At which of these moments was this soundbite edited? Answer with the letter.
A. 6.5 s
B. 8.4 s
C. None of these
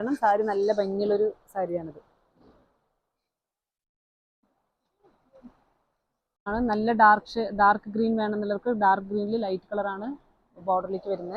A